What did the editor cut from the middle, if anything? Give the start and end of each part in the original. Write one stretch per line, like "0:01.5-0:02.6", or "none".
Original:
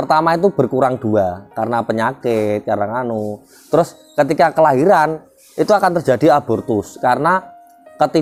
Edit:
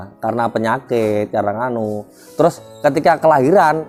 none

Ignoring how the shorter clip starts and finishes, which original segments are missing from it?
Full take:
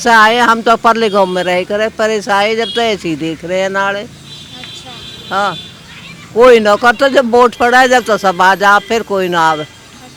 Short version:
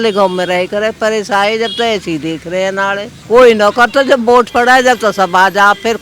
0:04.1-0:06.2

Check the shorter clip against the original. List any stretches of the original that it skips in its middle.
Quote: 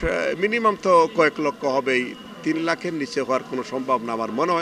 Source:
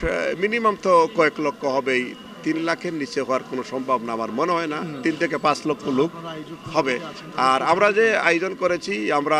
none

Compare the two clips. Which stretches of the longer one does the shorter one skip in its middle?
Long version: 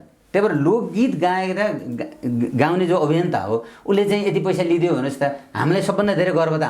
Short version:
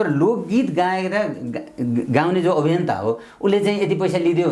none

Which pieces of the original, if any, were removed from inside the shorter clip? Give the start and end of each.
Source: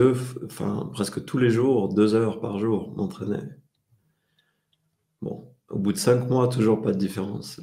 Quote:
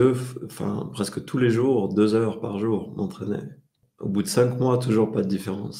0:03.8-0:05.5

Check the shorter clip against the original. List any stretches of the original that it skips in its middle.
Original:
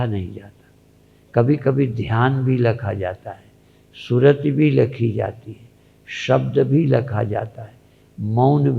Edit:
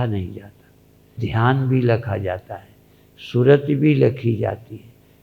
0:01.2-0:02.0

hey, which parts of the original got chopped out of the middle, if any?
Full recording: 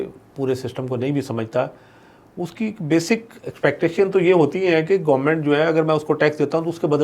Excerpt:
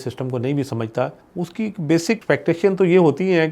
0:01.8-0:02.2
0:03.2-0:03.6

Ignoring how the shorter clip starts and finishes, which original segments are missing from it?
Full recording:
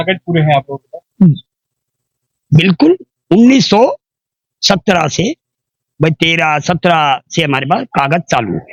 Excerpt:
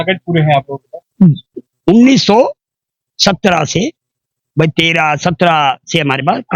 0:01.7-0:03.1

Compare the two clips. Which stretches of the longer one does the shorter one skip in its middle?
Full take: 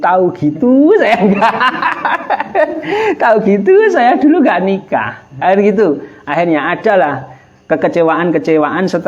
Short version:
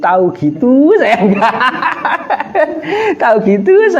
none

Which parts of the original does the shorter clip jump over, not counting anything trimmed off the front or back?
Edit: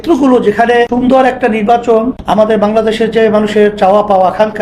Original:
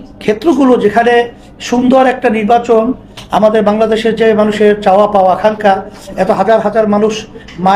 0:01.3-0:01.7
0:03.0-0:03.2

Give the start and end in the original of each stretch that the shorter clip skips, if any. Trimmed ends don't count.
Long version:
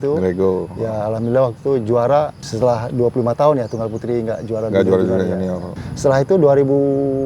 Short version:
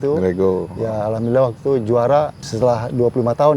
none

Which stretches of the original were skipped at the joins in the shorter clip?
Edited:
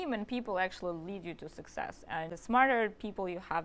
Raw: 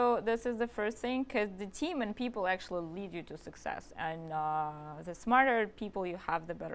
0:04.2-0:05.1

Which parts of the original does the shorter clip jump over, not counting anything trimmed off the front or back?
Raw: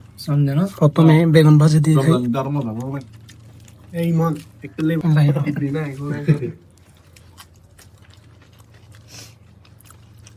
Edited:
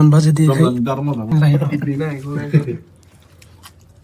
0:02.8-0:05.0

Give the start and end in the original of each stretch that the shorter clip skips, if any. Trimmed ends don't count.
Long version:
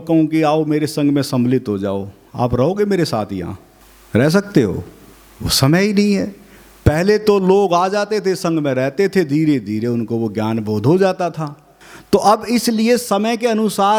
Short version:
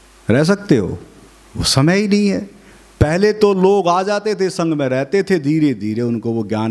none

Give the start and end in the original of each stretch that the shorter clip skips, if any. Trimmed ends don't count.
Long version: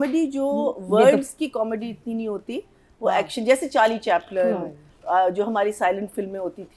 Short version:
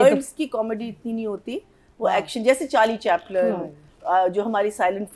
none

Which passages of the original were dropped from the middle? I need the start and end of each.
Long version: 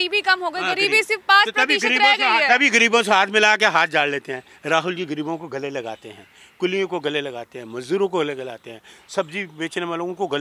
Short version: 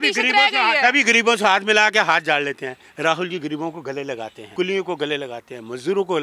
0:06.0-0:06.4

